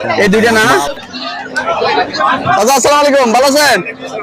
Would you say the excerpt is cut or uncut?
cut